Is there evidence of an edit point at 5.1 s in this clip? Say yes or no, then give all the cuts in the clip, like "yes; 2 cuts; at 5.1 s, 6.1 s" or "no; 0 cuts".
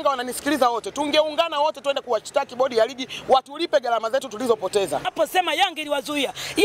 yes; 1 cut; at 5.1 s